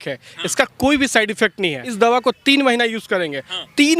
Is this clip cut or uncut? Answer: cut